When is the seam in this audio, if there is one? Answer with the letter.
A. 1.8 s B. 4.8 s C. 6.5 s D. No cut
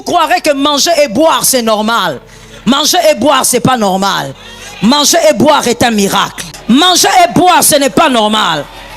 C